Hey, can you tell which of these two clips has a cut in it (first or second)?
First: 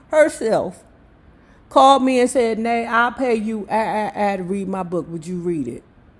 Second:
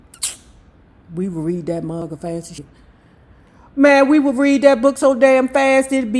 second